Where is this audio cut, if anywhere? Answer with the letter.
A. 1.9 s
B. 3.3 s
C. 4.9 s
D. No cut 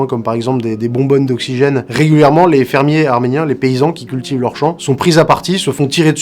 A